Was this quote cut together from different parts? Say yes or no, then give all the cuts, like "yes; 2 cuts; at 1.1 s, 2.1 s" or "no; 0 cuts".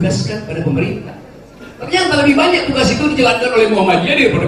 no; 0 cuts